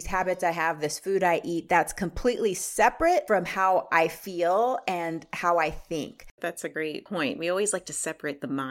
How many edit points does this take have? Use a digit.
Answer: 2